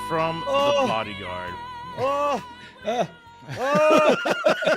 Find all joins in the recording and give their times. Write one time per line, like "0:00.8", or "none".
none

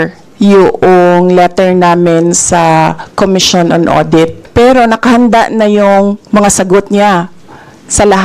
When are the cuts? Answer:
0:04.4

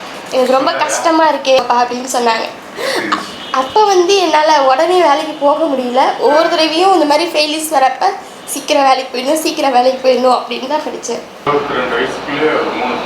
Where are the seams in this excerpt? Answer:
0:11.5

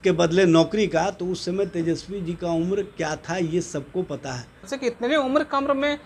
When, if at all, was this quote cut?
0:04.7

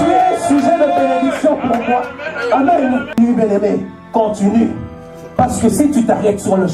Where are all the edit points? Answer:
0:03.2

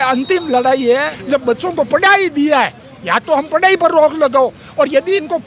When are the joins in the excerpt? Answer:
0:01.2

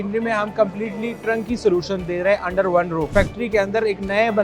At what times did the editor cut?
0:03.1

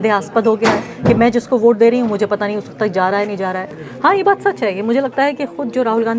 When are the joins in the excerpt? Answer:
0:03.8

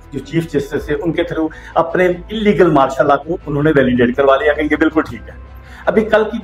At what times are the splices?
none

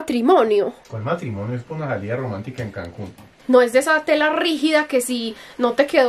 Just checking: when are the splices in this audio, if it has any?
0:03.4

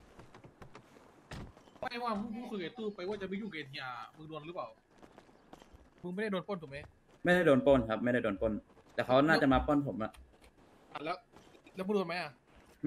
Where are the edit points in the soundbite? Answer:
0:06.0

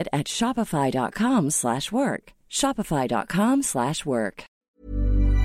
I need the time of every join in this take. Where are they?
0:04.5

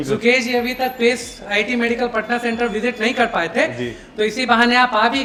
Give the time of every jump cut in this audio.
none

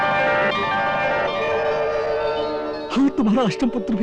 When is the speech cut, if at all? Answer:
none

